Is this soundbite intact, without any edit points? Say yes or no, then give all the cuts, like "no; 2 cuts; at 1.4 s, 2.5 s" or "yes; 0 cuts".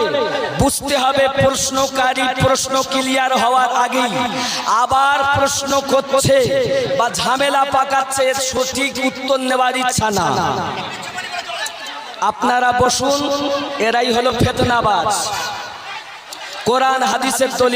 yes; 0 cuts